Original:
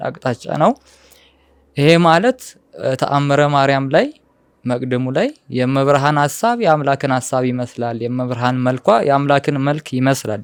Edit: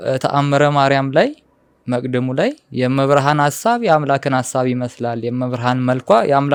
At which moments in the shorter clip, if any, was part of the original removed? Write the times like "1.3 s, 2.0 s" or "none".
none